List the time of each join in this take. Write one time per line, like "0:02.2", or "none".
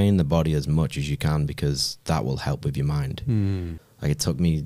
0:03.7